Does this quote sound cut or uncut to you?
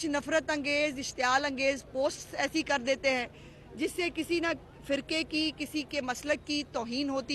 uncut